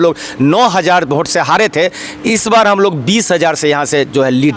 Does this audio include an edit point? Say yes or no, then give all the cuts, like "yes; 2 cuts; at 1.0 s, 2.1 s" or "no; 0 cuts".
no; 0 cuts